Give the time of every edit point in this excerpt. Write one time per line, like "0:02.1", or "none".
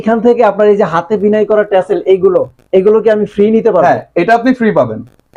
none

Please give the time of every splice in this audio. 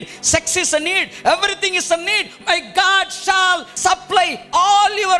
0:03.7

